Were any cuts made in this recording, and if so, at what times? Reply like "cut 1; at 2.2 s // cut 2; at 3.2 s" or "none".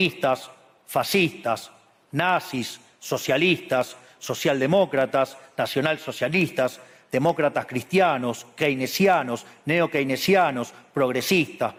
none